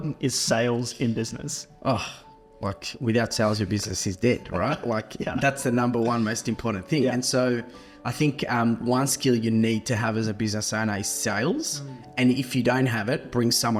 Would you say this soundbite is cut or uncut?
uncut